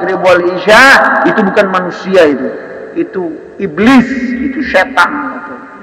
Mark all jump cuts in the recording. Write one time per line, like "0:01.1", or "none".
none

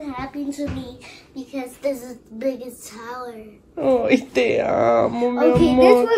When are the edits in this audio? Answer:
none

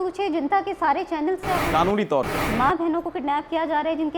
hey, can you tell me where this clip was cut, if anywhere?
0:02.4

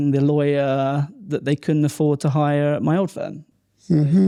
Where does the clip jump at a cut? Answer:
none

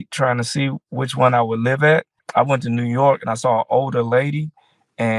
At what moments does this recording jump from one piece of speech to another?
0:02.2

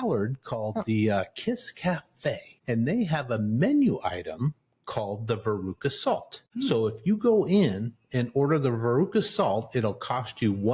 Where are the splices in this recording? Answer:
0:02.6
0:06.4

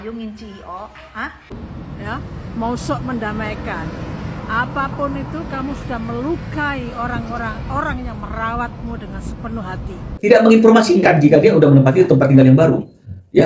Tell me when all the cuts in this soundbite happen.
0:01.6
0:10.3

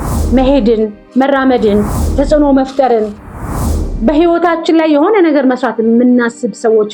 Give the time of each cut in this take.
0:02.0

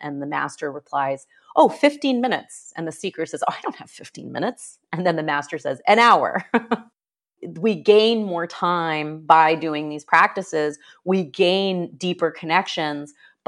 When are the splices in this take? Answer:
0:07.1

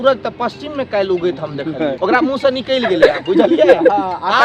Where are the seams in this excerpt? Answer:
0:02.0

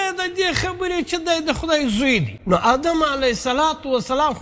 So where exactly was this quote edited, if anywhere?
0:02.3

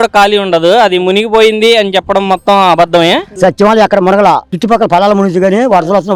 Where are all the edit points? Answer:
0:03.3

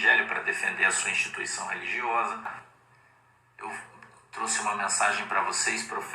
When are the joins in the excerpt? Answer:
0:02.5

